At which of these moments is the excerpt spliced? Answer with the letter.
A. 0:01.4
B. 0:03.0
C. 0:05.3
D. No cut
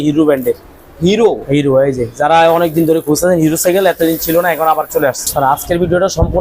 C